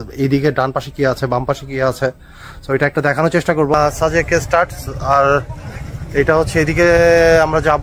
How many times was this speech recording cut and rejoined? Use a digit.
1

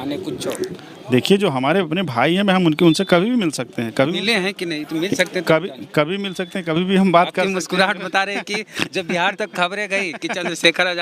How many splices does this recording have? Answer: 0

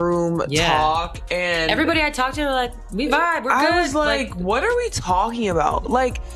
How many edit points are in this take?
0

